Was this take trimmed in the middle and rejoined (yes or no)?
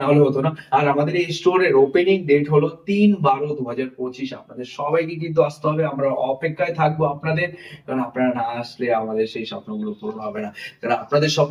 no